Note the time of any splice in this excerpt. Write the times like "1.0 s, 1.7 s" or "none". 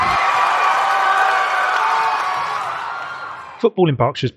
3.1 s